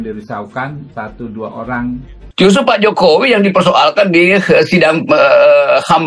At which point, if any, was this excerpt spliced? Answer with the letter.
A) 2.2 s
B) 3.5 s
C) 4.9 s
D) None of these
A